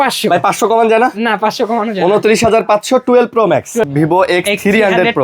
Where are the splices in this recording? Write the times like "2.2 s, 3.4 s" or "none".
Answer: 3.9 s